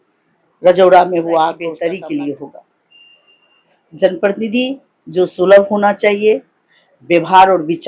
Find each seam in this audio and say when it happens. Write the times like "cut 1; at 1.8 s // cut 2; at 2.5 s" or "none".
cut 1; at 1.7 s